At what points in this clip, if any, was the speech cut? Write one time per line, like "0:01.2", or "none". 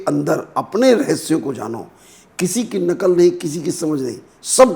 none